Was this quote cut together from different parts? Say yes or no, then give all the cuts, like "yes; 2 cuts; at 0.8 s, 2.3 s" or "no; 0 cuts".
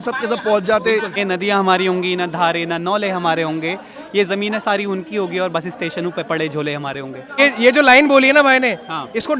yes; 2 cuts; at 1.2 s, 7.4 s